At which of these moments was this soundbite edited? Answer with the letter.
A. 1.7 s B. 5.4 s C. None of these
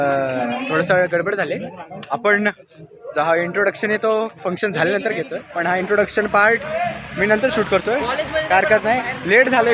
B